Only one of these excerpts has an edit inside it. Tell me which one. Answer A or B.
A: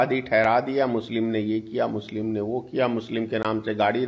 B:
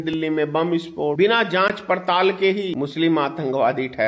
B